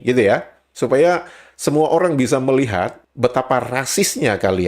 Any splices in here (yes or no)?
yes